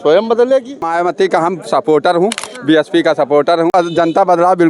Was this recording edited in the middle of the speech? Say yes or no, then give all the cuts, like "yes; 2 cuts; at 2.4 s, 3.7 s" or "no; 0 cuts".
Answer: yes; 2 cuts; at 0.8 s, 3.7 s